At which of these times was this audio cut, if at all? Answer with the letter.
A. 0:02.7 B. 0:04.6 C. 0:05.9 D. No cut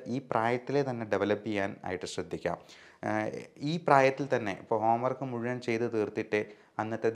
D